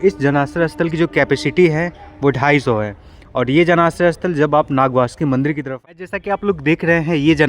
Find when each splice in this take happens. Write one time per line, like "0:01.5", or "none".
0:05.7